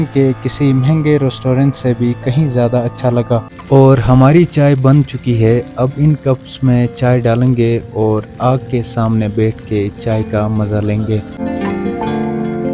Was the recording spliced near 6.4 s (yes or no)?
no